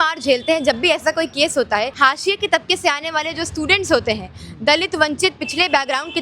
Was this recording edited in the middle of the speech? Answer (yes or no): yes